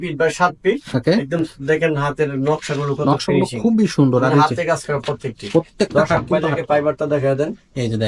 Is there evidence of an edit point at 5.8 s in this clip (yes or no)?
no